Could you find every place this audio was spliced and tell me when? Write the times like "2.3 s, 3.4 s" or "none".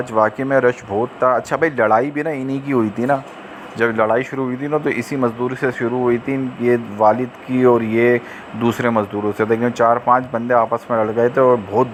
none

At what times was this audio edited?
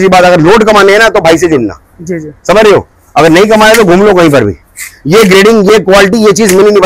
none

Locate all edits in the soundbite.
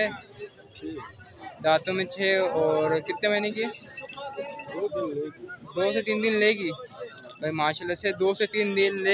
none

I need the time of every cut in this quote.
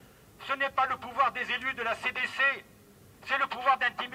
none

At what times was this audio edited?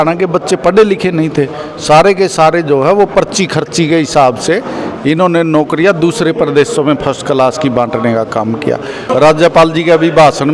9.1 s

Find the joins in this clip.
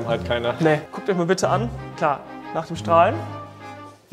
0.9 s, 1.8 s

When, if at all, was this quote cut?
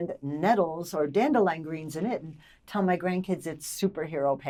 none

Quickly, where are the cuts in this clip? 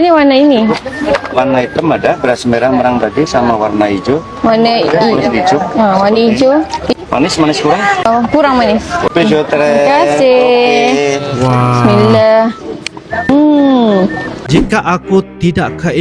14.4 s

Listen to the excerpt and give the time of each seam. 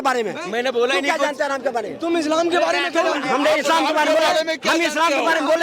none

